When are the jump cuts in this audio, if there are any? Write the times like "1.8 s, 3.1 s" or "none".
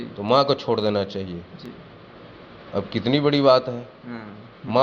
none